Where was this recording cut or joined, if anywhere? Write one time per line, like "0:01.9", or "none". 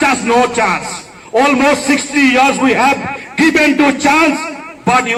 none